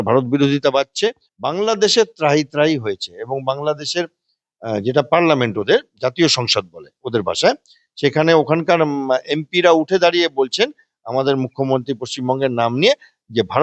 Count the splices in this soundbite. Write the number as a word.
one